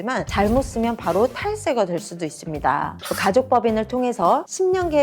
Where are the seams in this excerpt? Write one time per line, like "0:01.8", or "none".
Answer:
0:03.0